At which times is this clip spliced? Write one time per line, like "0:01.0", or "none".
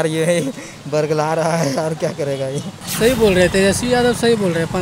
0:02.8